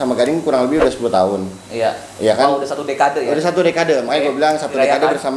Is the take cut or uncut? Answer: uncut